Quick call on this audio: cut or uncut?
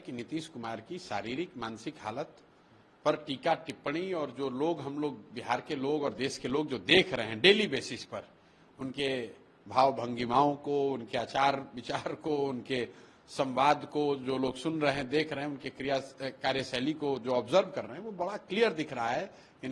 uncut